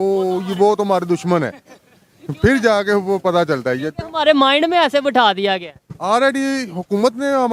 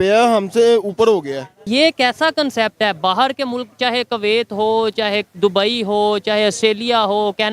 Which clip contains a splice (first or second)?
second